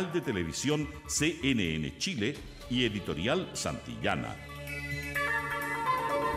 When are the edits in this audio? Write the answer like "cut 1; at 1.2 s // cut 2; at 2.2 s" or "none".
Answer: cut 1; at 4.4 s